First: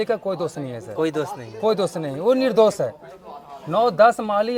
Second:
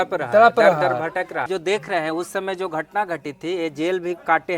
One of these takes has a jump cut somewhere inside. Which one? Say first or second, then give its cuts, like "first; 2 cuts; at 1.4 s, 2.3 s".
second; 1 cut; at 1.5 s